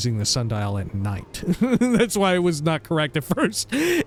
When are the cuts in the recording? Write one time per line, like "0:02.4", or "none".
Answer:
none